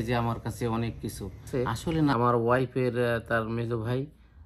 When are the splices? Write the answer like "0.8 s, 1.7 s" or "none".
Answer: 2.1 s